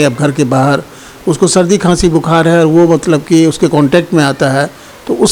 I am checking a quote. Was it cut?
no; 0 cuts

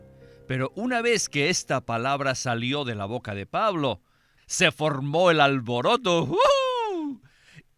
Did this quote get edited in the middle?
no; 0 cuts

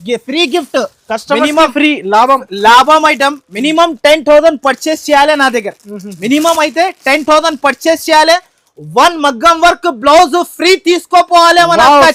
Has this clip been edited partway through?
no; 0 cuts

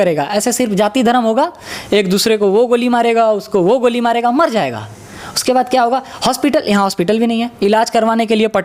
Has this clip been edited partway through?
no; 0 cuts

